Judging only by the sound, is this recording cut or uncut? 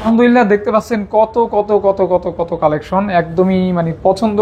uncut